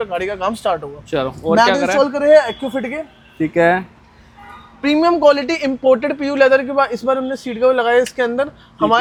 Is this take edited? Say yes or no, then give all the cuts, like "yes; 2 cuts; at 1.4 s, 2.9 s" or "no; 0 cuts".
no; 0 cuts